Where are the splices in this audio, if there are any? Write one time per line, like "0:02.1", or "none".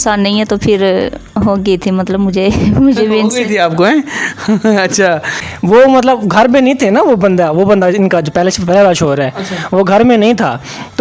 0:05.3